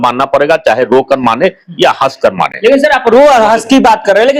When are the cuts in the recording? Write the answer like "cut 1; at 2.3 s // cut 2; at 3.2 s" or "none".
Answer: none